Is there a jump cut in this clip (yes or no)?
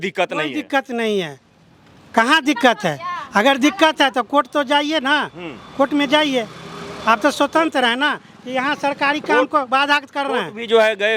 no